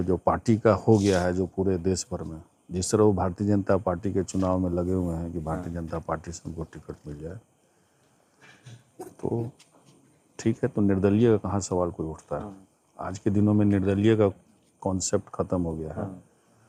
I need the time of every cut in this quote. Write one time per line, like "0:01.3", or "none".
none

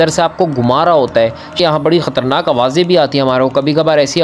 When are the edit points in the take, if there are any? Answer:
0:01.6

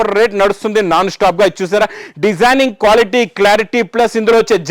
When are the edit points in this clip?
none

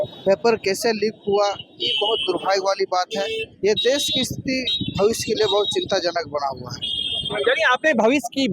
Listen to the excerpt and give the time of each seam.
none

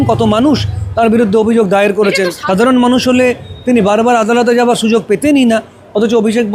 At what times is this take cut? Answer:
0:02.4

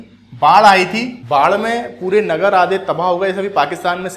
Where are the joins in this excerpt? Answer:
0:01.1

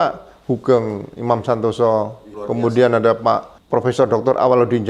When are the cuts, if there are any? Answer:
0:02.4
0:03.5

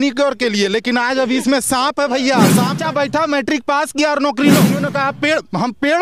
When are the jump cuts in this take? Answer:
0:02.8
0:04.8

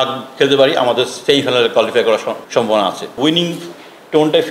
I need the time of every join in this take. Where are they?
0:01.2
0:02.4
0:03.2

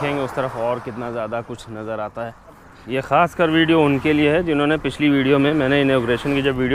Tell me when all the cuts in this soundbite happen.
0:02.7

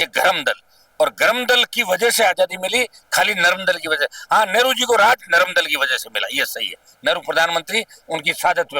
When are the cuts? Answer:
none

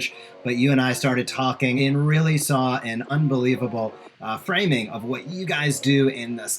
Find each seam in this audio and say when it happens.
0:01.8
0:03.1

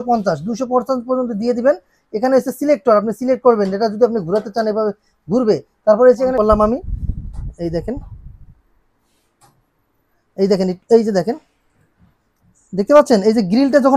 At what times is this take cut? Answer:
0:06.3

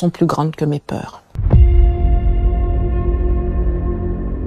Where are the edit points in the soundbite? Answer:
0:01.4

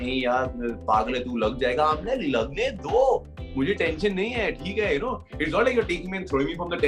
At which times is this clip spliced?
none

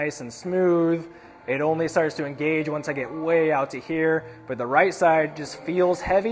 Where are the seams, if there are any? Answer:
none

